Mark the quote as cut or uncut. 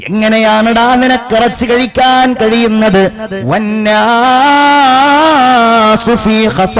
uncut